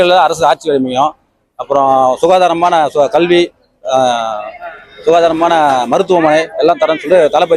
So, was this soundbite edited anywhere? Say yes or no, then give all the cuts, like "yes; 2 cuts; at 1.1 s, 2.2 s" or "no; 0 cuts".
no; 0 cuts